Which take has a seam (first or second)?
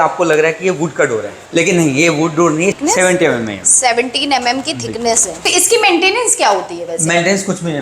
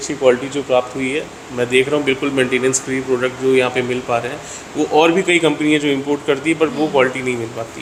first